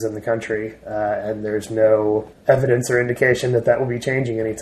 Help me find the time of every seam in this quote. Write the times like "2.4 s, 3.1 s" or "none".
2.3 s